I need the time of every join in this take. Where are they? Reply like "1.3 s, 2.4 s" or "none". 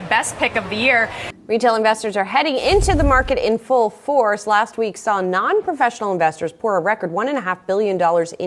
1.2 s